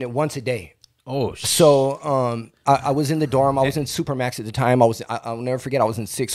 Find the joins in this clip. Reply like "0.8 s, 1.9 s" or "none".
none